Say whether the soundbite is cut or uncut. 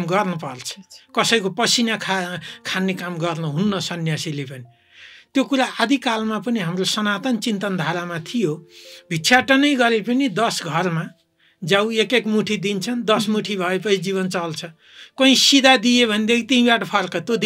uncut